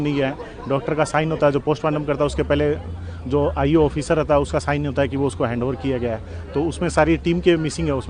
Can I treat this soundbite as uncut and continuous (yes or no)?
yes